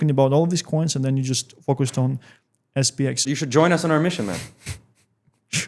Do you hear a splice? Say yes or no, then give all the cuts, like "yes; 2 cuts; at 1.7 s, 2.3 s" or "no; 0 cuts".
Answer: yes; 1 cut; at 3.2 s